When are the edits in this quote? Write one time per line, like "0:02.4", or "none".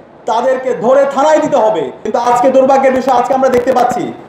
0:02.1